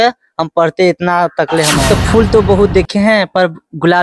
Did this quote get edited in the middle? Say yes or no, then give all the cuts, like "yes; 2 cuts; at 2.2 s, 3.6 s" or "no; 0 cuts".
yes; 1 cut; at 1.9 s